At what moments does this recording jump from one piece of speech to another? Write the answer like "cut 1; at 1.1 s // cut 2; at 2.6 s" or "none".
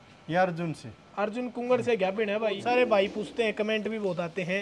cut 1; at 2.6 s